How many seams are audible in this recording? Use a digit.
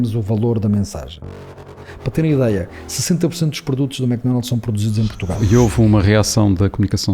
2